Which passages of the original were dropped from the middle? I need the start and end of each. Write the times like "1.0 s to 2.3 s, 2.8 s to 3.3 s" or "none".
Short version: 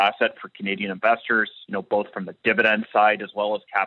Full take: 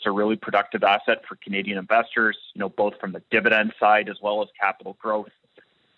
none